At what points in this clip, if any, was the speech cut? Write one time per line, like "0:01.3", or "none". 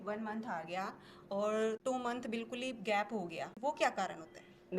0:01.8
0:03.6